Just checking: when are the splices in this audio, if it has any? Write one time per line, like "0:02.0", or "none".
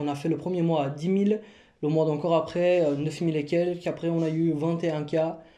none